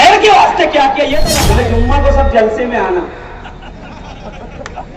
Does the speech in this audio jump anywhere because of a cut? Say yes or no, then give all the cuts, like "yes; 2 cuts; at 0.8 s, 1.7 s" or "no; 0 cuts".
yes; 1 cut; at 1.3 s